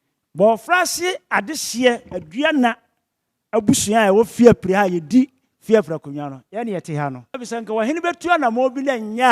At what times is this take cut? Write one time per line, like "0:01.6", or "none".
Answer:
0:07.3